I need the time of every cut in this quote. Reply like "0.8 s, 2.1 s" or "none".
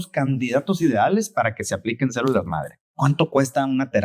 2.8 s